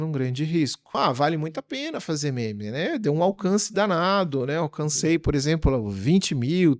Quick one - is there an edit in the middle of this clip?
yes; 1 cut; at 0.9 s

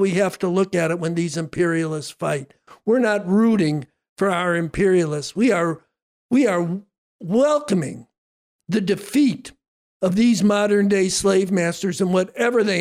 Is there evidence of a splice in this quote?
no; 0 cuts

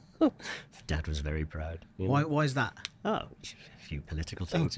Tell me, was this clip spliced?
no; 0 cuts

